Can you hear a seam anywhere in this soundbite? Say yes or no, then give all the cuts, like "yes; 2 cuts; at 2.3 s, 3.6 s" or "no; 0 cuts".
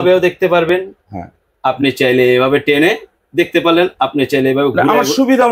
no; 0 cuts